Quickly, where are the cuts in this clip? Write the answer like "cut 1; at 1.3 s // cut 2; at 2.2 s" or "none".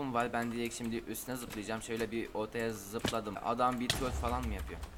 cut 1; at 3.4 s